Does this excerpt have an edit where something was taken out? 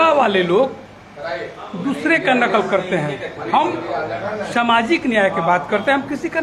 no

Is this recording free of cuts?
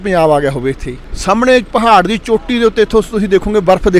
yes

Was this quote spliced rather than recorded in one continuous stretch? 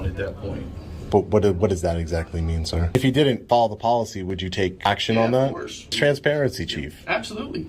yes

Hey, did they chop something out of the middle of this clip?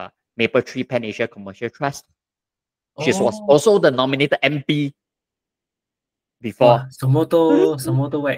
no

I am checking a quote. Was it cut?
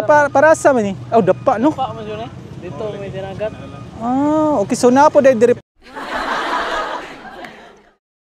no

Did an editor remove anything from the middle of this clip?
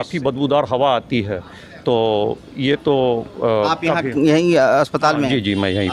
no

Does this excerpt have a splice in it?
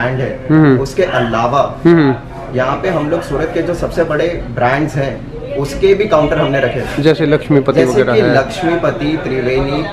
no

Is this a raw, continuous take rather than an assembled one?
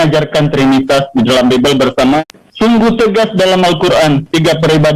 no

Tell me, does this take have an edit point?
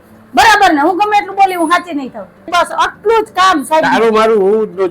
yes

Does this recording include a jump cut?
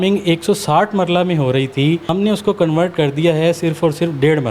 yes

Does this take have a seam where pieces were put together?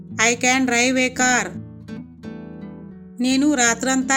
no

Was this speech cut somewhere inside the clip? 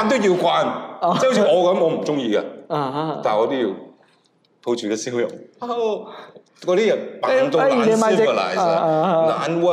no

